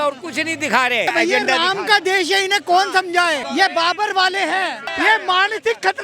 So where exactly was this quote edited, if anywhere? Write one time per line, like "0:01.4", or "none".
0:01.1
0:03.4
0:04.8